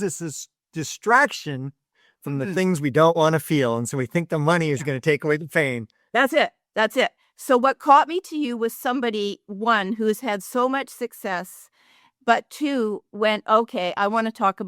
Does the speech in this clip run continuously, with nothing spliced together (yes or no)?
yes